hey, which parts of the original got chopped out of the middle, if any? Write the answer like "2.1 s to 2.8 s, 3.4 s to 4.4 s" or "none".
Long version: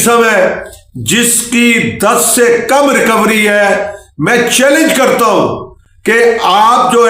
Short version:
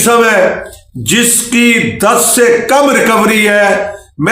none